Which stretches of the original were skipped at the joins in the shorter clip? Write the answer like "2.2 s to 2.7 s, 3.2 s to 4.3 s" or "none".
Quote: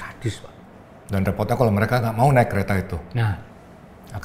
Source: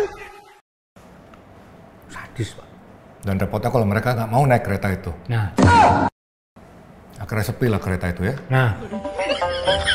5.4 s to 6.3 s